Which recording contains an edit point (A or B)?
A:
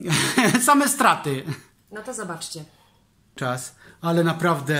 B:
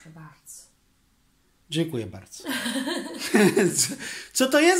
A